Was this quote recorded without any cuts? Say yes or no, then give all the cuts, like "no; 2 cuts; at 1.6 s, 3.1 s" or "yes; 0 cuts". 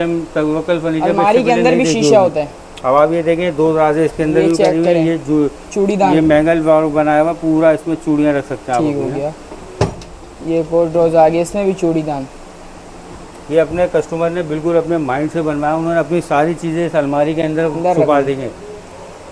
yes; 0 cuts